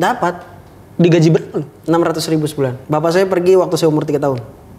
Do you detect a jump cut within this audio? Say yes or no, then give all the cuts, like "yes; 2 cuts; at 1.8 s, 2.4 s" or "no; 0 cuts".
yes; 1 cut; at 2.8 s